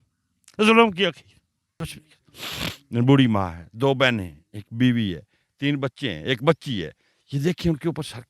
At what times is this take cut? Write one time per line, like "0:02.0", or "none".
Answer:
0:01.7